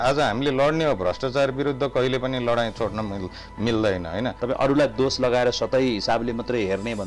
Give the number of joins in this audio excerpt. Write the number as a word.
one